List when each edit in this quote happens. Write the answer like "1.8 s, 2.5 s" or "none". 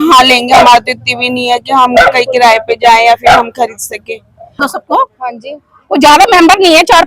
4.6 s